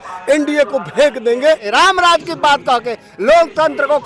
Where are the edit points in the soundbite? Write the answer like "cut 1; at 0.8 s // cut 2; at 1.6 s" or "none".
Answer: cut 1; at 1.6 s